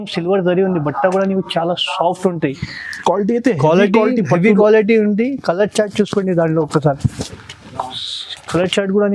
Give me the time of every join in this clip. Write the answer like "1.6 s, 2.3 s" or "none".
none